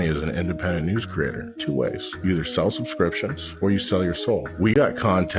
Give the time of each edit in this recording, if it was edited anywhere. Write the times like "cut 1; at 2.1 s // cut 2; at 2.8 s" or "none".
none